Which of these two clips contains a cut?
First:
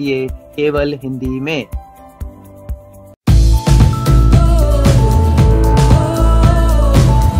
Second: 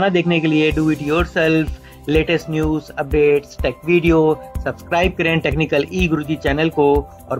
first; 1 cut; at 3.1 s

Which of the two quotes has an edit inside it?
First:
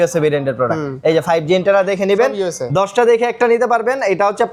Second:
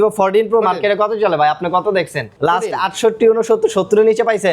second; 1 cut; at 2.2 s

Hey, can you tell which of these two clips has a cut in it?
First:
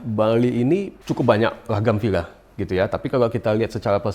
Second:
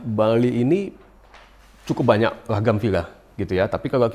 first; 1 cut; at 1.0 s

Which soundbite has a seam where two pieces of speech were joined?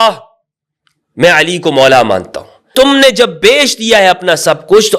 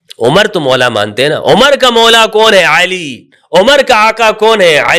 first; 1 cut; at 2.7 s

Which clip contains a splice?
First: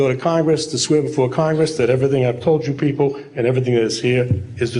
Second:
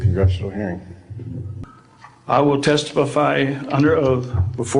second; 1 cut; at 1.5 s

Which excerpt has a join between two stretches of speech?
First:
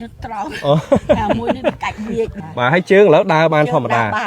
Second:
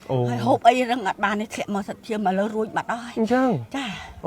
first; 1 cut; at 2.4 s

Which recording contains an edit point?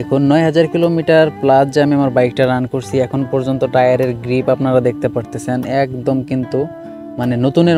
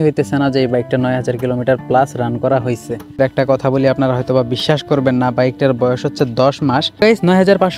second; 2 cuts; at 3.2 s, 7.0 s

